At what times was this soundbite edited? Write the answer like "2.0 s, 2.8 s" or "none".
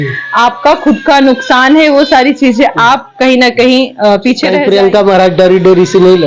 4.5 s